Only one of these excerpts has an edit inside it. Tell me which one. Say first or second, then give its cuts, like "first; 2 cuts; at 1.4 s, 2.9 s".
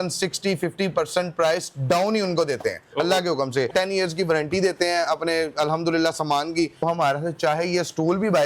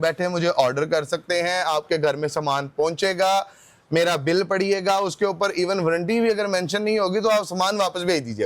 first; 2 cuts; at 3.7 s, 6.8 s